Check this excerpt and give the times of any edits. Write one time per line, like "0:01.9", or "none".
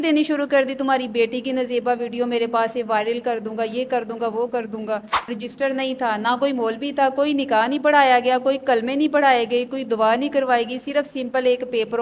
0:05.4